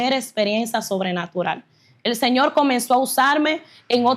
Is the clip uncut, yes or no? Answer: yes